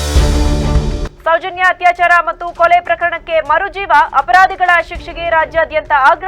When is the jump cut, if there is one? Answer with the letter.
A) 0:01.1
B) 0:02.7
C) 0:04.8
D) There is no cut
D